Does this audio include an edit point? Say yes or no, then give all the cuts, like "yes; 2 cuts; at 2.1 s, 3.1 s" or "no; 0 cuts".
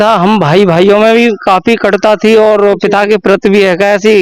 no; 0 cuts